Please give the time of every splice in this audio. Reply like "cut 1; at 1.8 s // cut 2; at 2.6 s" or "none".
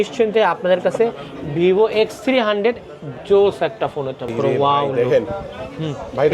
cut 1; at 4.3 s